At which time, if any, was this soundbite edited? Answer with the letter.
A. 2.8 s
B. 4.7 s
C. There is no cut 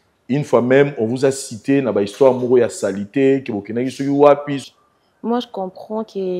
B